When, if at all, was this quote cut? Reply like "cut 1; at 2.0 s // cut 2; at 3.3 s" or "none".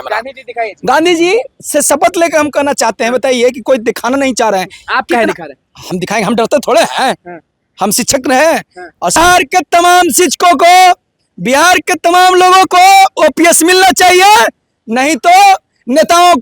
cut 1; at 9.2 s